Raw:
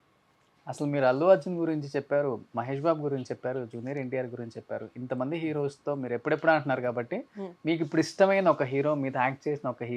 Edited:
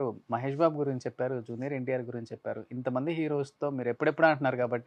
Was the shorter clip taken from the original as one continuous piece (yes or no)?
yes